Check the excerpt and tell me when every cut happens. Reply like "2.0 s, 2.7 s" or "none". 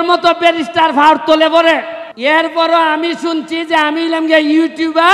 2.0 s

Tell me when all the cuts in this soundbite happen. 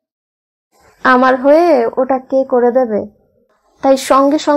3.6 s

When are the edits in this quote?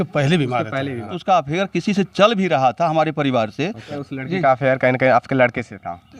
1.2 s, 3.9 s

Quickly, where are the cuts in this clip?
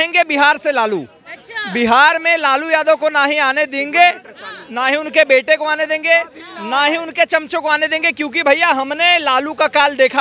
none

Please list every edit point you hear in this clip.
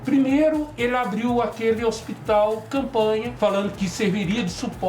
3.3 s

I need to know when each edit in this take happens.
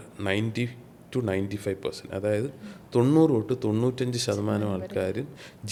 none

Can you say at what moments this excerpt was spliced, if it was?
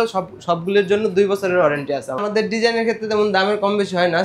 2.2 s

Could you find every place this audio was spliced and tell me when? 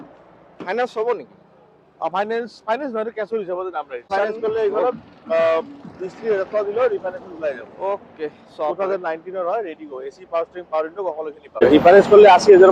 4.1 s, 11.6 s

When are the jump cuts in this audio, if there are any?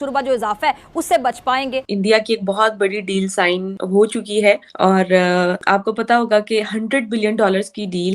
1.9 s, 3.7 s, 4.7 s, 5.6 s

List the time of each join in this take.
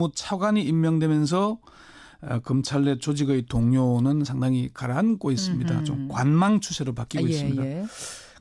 2.5 s

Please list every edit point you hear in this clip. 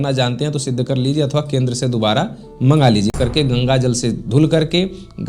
3.1 s

